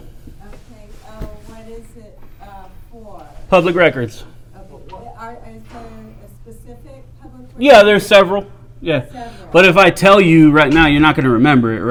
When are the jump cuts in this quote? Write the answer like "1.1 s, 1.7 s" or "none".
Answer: none